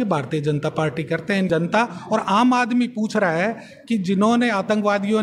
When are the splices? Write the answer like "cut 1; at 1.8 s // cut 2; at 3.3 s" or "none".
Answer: cut 1; at 1.5 s